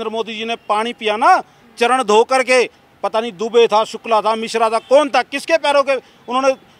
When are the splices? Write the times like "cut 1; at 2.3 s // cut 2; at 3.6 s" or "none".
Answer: none

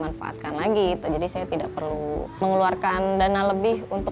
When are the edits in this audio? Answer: cut 1; at 2.4 s

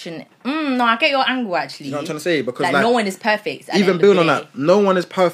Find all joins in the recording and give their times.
none

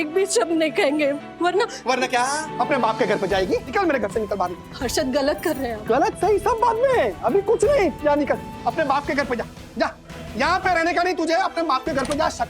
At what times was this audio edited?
cut 1; at 2.5 s // cut 2; at 3.7 s

